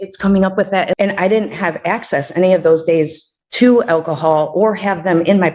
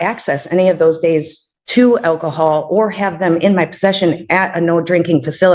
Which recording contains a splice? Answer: first; 1 cut; at 0.9 s

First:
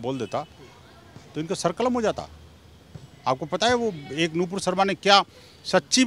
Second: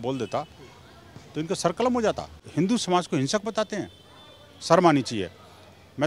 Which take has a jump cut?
second; 1 cut; at 2.3 s

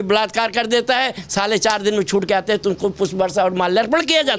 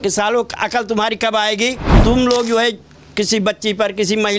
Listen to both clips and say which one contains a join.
second; 1 cut; at 1.9 s

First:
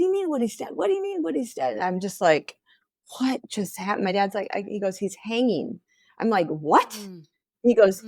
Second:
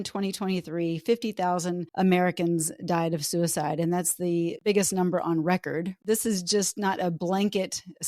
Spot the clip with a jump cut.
second; 3 cuts; at 1.8 s, 4.6 s, 5.9 s

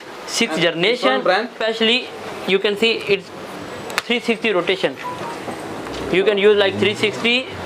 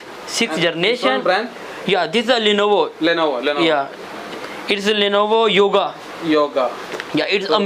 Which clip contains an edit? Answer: first; 1 cut; at 1.6 s

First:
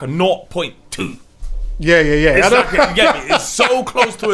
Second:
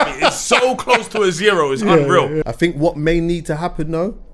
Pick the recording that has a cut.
second; 1 cut; at 2.4 s

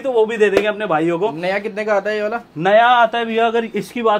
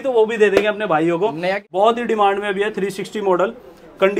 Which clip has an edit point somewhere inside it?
second; 1 cut; at 1.6 s

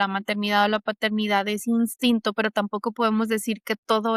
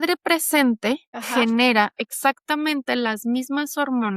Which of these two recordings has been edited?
second; 1 cut; at 1.2 s

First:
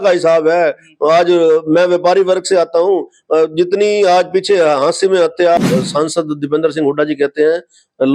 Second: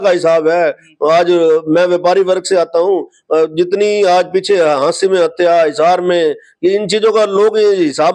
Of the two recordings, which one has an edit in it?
first; 1 cut; at 5.6 s

